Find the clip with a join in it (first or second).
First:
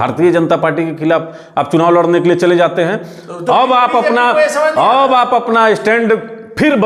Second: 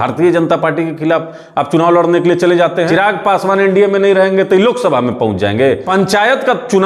second